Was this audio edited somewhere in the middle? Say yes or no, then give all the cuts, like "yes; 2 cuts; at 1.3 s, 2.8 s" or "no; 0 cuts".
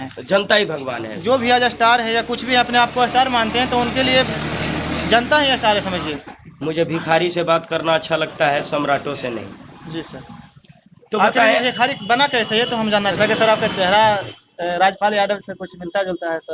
yes; 2 cuts; at 6.2 s, 13.1 s